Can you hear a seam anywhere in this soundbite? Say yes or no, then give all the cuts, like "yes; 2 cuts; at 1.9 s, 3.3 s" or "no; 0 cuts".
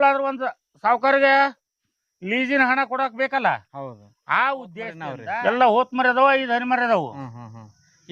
yes; 1 cut; at 5.1 s